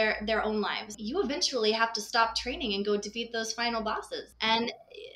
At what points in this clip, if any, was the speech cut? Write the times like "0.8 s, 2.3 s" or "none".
1.0 s, 4.3 s

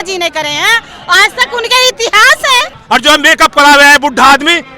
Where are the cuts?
2.7 s

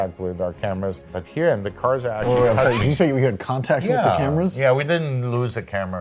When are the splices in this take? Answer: 1.1 s

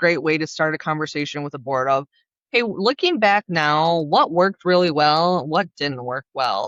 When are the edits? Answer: none

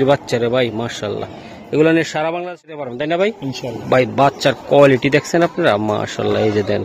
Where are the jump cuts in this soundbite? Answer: 2.8 s

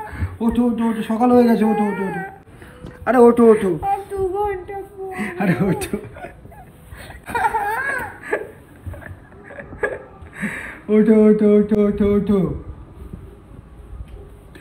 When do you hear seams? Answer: none

